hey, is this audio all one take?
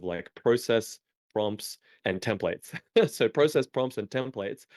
no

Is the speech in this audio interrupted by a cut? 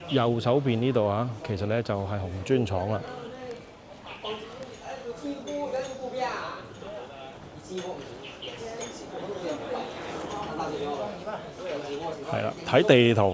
no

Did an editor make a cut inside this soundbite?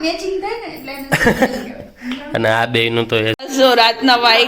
yes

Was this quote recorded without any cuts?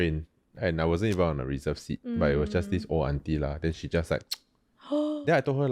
yes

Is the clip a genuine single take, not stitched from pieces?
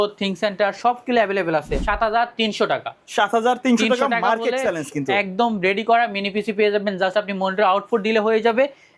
no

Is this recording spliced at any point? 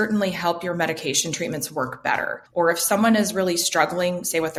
no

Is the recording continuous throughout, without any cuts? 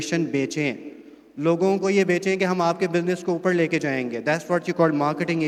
yes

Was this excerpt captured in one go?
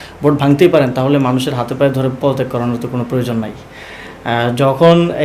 yes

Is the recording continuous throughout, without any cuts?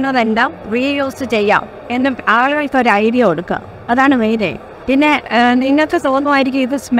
no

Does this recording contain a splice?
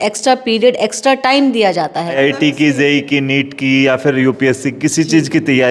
yes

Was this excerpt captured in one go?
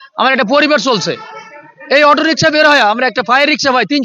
yes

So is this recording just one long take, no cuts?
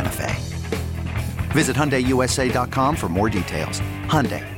yes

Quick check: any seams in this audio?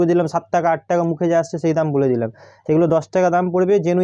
no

